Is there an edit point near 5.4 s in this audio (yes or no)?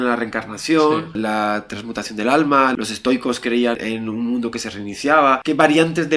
yes